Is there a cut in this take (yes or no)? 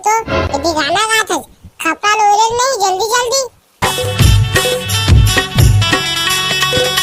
yes